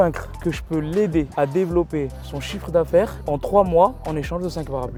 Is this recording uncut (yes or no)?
yes